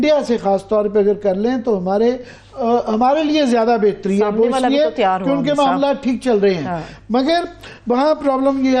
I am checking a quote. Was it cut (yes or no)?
no